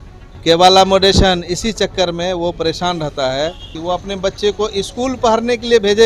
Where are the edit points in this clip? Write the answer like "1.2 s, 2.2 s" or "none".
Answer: 3.7 s